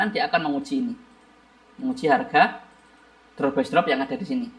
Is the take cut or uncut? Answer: uncut